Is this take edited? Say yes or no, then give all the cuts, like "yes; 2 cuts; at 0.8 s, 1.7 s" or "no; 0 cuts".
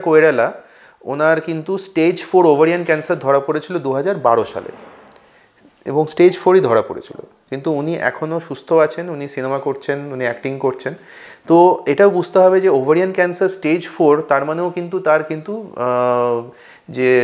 no; 0 cuts